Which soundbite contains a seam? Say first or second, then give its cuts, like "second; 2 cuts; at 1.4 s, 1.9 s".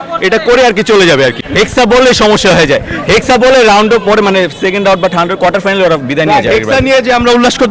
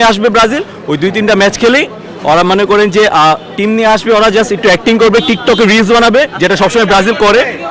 first; 1 cut; at 1.4 s